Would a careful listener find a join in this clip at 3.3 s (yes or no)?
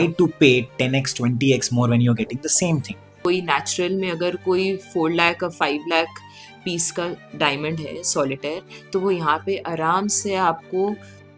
yes